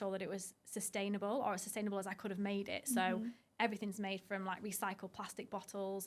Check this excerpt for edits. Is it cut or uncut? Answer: uncut